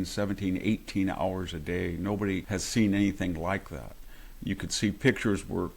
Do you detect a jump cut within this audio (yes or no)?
yes